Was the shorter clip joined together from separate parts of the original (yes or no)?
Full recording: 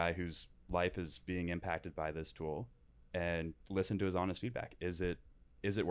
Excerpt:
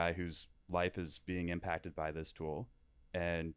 no